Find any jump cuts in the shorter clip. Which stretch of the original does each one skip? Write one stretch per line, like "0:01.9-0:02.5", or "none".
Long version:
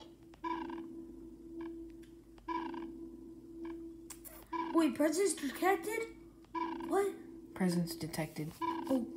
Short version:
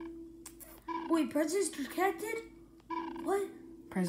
0:02.7-0:04.7